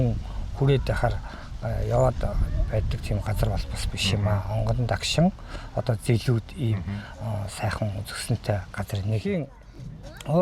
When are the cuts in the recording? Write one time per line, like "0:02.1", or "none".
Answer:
0:09.2